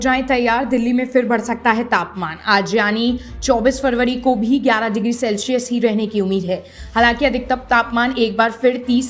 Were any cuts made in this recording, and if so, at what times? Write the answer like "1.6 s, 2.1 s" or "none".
none